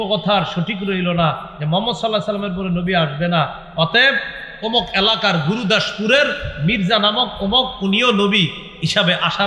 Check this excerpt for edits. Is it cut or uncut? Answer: uncut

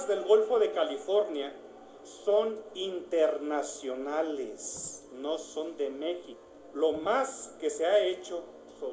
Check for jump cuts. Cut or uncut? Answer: uncut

